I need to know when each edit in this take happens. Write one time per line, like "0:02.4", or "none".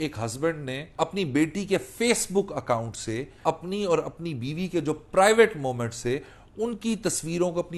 0:01.0
0:03.4

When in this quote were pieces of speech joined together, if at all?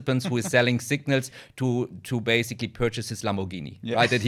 none

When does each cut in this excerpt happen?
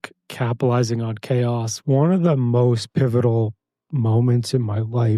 0:01.7

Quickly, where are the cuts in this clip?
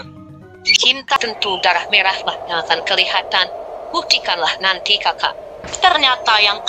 0:01.1

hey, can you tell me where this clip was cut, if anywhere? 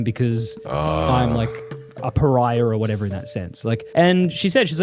0:03.8

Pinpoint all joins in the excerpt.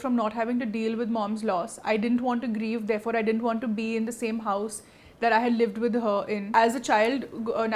0:06.5

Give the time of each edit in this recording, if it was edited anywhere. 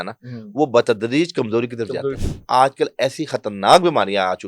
0:02.2

